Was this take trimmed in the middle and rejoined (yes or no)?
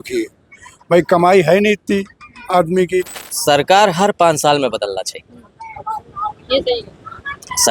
yes